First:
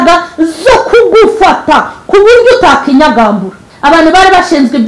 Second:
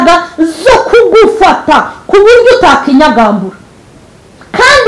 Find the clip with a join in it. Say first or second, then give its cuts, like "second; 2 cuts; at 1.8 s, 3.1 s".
first; 1 cut; at 3.7 s